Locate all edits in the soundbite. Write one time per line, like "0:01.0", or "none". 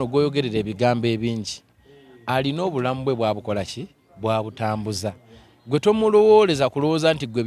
none